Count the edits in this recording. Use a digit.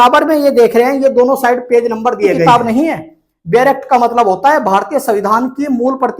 1